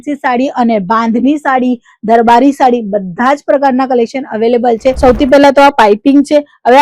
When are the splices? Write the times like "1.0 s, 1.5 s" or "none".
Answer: 5.0 s